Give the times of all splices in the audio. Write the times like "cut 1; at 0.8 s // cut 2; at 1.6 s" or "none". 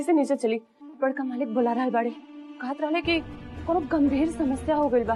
none